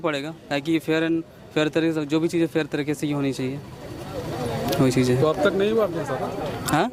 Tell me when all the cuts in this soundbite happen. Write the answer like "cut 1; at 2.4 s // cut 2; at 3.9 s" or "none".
none